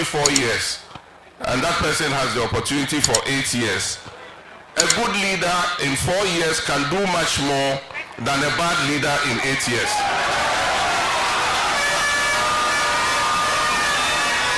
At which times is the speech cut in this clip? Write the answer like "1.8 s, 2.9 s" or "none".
none